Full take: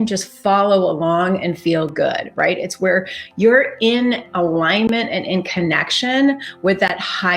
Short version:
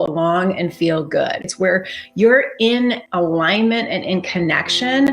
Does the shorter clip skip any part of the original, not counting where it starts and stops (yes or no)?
yes